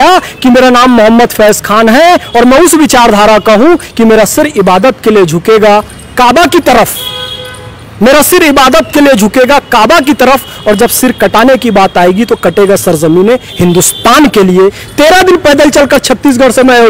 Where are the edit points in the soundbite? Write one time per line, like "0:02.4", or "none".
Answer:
0:14.8